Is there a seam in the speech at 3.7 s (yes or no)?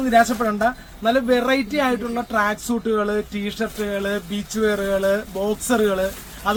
no